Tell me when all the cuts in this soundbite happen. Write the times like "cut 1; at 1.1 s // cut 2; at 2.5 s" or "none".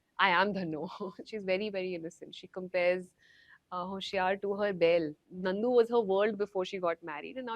cut 1; at 1.2 s // cut 2; at 5.3 s